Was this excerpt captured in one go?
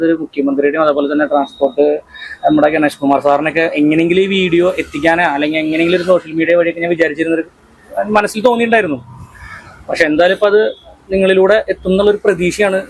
yes; 0 cuts

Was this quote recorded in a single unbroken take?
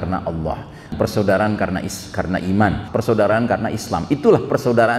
no; 2 cuts; at 0.9 s, 2.9 s

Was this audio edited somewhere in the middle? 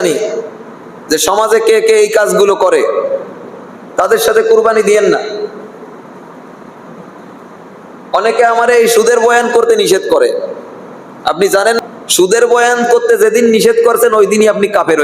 yes; 1 cut; at 11.8 s

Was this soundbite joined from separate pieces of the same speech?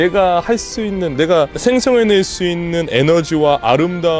yes; 1 cut; at 1.5 s

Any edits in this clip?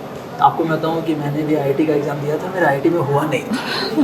no; 0 cuts

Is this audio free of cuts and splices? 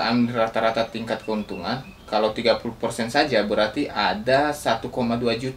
yes; 0 cuts

